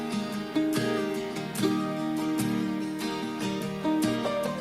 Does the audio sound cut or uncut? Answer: uncut